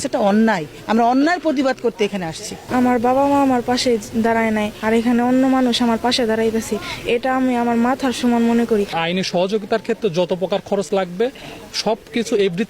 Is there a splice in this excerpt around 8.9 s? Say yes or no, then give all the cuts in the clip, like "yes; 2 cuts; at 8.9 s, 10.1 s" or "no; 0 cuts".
yes; 2 cuts; at 2.6 s, 8.9 s